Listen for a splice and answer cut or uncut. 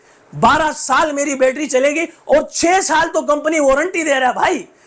uncut